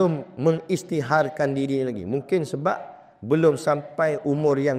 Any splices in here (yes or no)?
no